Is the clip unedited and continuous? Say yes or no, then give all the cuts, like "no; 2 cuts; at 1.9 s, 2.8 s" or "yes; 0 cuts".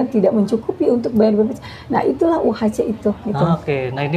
yes; 0 cuts